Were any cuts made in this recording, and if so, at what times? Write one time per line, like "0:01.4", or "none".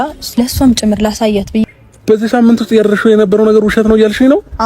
0:01.6